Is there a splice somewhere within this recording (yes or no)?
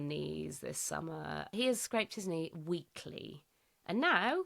yes